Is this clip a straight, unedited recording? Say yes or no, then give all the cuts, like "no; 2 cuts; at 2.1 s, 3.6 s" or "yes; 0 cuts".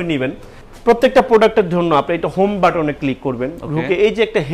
yes; 0 cuts